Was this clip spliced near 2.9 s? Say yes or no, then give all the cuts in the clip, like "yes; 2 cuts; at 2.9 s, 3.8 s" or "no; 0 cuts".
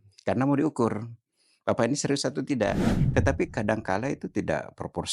yes; 1 cut; at 2.9 s